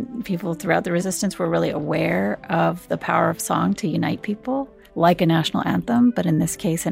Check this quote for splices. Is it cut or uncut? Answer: cut